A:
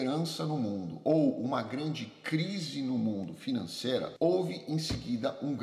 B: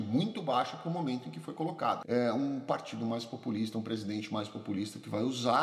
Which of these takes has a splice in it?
B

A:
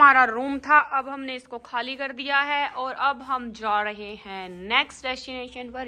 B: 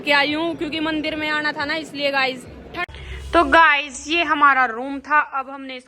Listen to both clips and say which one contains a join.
B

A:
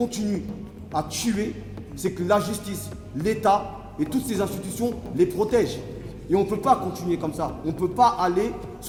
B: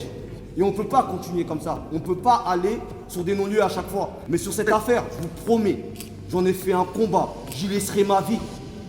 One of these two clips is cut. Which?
B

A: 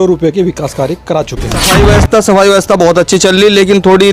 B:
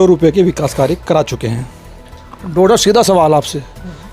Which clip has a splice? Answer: A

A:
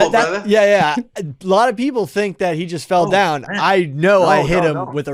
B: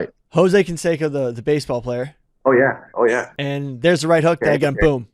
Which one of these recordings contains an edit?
B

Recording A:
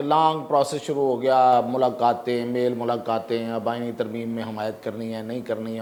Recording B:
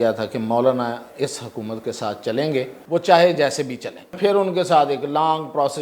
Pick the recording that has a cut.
B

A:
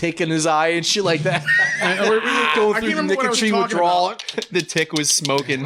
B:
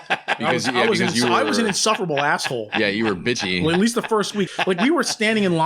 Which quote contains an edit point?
B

